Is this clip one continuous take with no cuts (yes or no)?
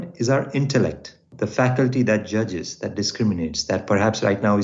no